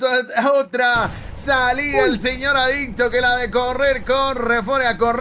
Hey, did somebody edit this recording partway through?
no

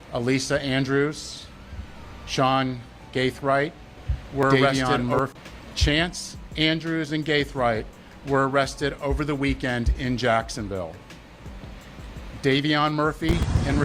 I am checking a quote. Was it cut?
yes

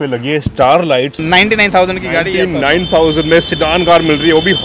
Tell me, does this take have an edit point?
yes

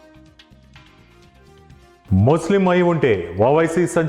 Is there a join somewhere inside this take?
yes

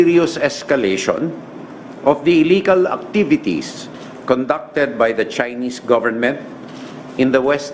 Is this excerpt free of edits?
yes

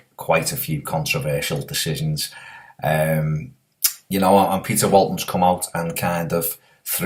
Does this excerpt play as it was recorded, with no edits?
yes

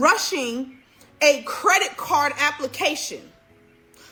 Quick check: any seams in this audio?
no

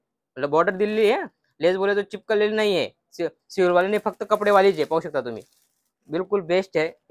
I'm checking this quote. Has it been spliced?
no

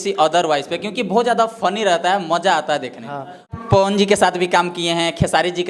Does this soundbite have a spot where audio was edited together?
yes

